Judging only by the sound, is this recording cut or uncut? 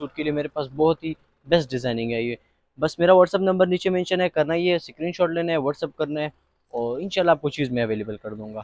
uncut